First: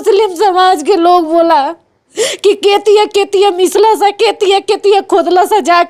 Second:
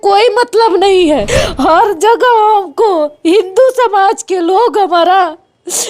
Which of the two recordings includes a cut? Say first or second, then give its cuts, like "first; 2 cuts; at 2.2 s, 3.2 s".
second; 1 cut; at 1.3 s